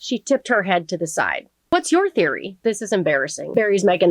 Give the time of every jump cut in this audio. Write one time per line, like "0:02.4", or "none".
0:01.5
0:02.5